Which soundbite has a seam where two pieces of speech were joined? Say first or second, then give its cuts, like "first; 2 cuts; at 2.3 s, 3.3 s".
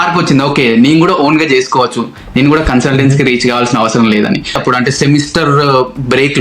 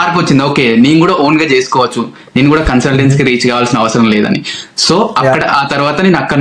first; 1 cut; at 4.6 s